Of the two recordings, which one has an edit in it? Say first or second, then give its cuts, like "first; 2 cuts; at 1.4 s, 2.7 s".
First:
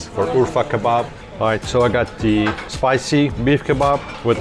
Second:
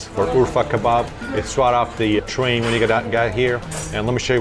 first; 2 cuts; at 1.2 s, 3.4 s